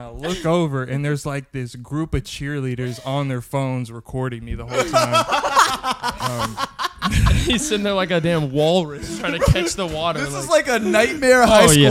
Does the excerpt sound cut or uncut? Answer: uncut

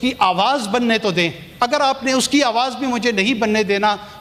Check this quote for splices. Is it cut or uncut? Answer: uncut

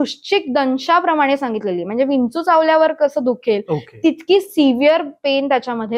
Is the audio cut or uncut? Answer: uncut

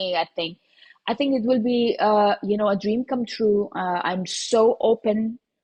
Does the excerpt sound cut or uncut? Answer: uncut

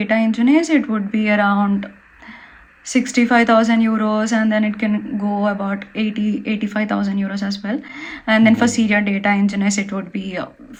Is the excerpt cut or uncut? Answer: uncut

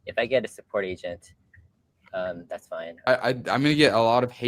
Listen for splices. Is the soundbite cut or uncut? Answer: cut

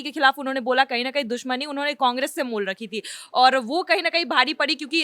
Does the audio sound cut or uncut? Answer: uncut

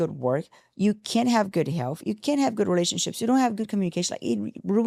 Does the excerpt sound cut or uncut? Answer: uncut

